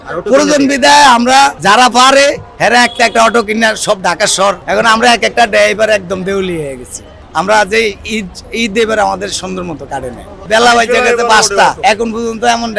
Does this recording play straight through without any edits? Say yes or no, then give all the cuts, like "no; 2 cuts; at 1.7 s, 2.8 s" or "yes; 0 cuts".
no; 4 cuts; at 1.6 s, 4.6 s, 10.4 s, 11.8 s